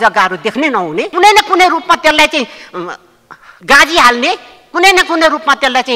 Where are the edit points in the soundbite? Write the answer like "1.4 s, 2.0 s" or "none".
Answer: 1.1 s